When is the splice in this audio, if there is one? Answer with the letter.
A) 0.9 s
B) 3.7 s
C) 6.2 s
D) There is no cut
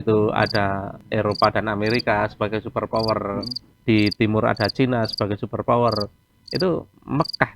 A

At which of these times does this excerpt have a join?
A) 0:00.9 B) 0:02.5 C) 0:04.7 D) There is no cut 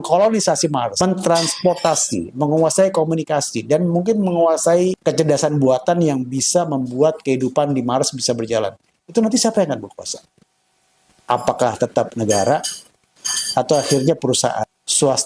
A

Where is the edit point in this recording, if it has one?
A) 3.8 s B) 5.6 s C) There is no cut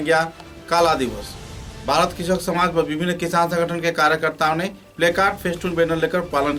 C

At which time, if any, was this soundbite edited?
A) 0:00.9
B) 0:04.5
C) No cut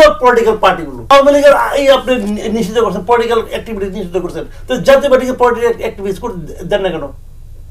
A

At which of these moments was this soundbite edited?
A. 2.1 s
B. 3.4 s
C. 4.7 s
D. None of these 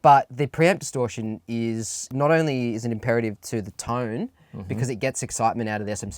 A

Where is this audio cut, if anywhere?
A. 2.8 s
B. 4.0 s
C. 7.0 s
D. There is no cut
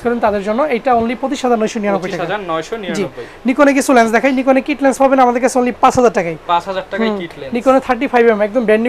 D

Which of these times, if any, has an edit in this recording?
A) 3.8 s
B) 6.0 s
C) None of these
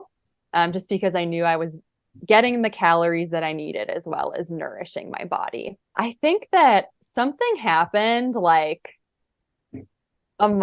B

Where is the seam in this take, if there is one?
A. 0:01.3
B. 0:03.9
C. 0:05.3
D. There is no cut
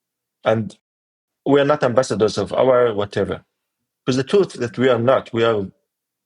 A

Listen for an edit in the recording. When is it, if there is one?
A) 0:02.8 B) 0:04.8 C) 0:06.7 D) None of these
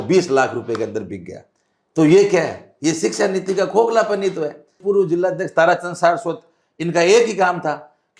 B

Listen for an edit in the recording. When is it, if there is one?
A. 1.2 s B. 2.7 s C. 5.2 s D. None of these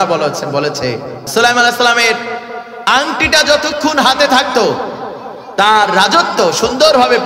A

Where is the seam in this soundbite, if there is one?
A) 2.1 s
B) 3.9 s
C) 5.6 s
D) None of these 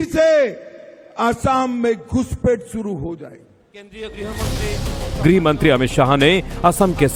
D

